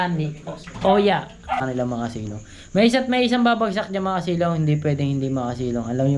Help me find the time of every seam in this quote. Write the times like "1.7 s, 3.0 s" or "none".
1.6 s